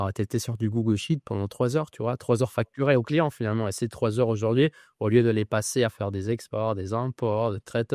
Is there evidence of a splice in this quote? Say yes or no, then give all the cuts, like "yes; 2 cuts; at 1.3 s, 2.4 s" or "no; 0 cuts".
no; 0 cuts